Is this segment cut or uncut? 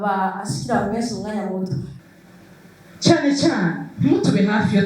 cut